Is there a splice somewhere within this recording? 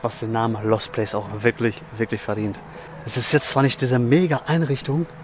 no; 0 cuts

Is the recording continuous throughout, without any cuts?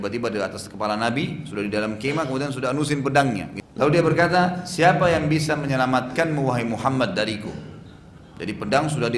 no; 1 cut; at 3.6 s

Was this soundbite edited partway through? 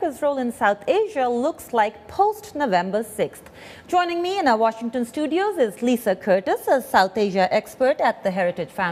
no; 0 cuts

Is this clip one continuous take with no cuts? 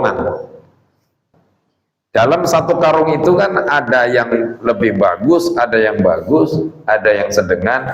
no; 1 cut; at 1.2 s

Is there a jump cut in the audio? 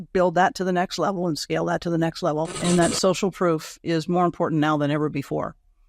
yes; 1 cut; at 2.6 s

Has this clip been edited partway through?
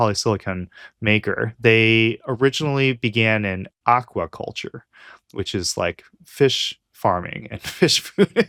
no; 0 cuts

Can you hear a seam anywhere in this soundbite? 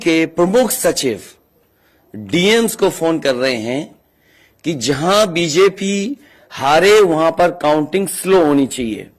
no; 0 cuts

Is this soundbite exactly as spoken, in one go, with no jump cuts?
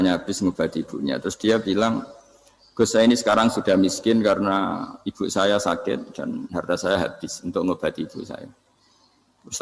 yes; 0 cuts

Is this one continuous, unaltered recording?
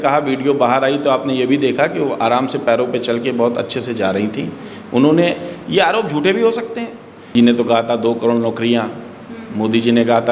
no; 1 cut; at 7.3 s

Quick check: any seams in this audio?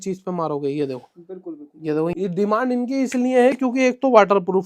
yes; 1 cut; at 2.1 s

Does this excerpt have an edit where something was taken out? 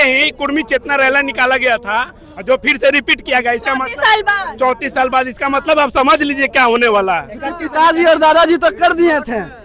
no; 0 cuts

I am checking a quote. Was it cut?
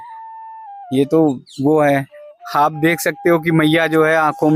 no; 0 cuts

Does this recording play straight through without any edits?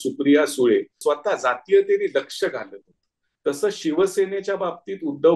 no; 1 cut; at 0.9 s

